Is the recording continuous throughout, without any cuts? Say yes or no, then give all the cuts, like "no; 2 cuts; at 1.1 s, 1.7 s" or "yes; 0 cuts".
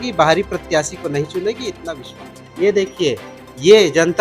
no; 1 cut; at 2.4 s